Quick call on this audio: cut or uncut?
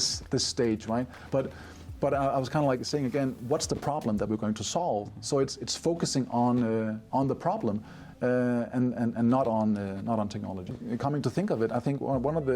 cut